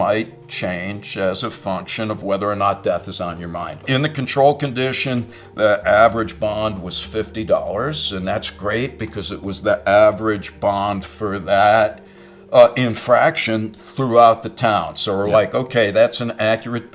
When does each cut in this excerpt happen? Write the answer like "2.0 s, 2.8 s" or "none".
3.8 s